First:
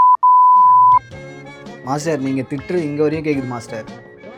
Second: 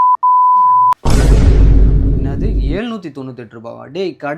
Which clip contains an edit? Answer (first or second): second